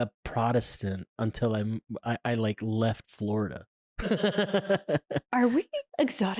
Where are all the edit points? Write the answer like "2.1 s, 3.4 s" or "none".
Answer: 5.2 s

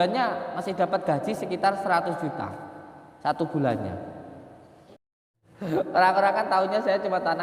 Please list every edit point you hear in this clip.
5.2 s

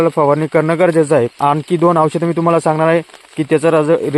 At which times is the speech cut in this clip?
1.3 s

